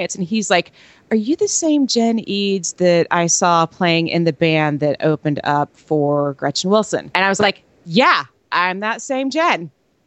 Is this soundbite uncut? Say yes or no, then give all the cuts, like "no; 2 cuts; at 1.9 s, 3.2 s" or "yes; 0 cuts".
no; 1 cut; at 7.1 s